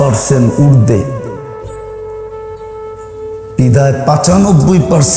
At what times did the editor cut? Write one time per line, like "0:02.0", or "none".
0:01.2
0:03.5